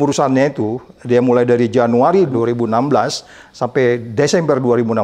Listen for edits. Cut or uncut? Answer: uncut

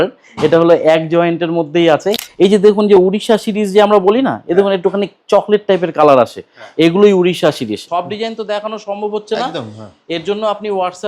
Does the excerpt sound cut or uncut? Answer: cut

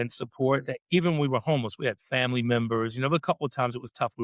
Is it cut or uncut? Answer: uncut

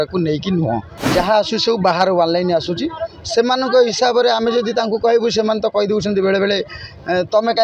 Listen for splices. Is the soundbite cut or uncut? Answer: cut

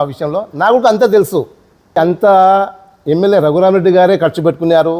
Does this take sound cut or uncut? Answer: cut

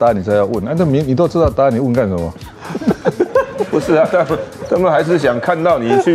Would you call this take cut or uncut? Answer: uncut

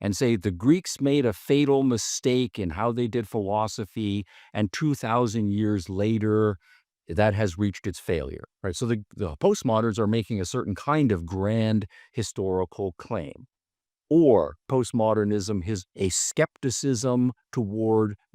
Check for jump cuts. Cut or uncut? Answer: cut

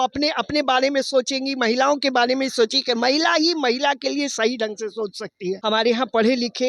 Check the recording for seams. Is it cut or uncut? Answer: cut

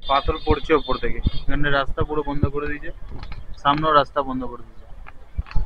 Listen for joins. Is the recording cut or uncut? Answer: uncut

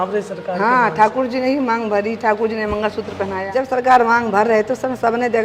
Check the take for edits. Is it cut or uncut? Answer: cut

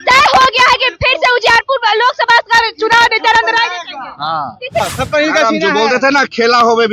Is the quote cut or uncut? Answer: cut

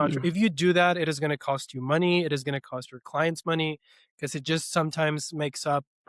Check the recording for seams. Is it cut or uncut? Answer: uncut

